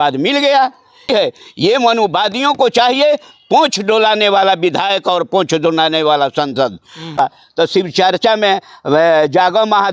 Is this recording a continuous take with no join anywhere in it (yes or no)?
no